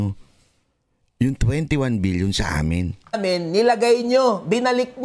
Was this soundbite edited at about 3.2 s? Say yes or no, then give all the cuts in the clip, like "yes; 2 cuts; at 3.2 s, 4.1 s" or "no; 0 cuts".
yes; 1 cut; at 3.2 s